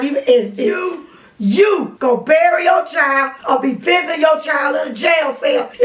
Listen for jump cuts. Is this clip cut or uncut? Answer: cut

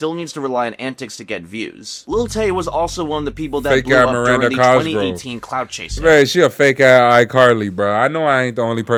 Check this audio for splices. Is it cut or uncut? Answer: uncut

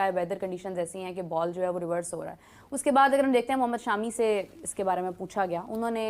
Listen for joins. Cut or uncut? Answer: uncut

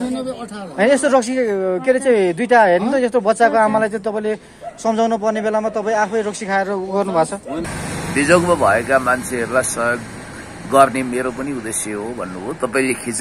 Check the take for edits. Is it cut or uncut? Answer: cut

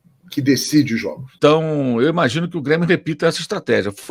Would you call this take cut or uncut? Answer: cut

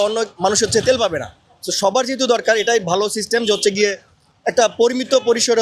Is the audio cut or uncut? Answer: uncut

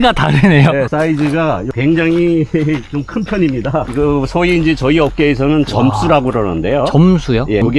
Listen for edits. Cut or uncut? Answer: uncut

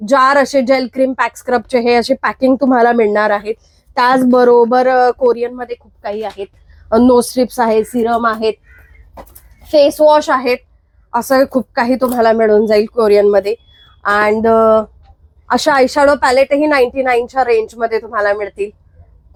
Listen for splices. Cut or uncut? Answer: uncut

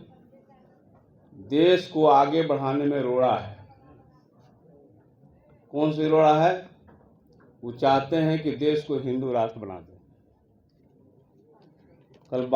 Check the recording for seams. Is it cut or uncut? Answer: cut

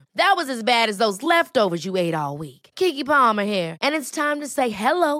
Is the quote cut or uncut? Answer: uncut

